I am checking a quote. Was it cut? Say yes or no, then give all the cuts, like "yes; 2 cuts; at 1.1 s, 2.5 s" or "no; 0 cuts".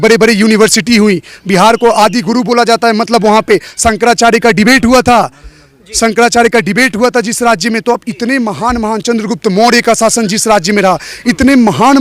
no; 0 cuts